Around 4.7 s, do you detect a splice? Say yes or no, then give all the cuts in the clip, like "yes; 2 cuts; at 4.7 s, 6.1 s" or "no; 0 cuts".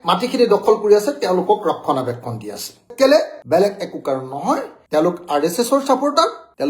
yes; 1 cut; at 4.7 s